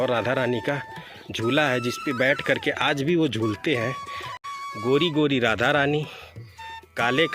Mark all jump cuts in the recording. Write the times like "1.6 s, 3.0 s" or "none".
4.3 s